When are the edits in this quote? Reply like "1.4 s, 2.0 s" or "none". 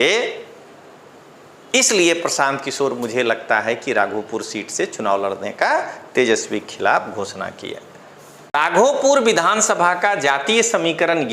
8.5 s